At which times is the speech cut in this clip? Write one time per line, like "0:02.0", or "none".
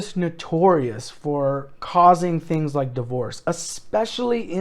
none